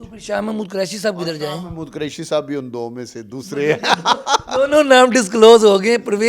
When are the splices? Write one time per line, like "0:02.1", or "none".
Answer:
none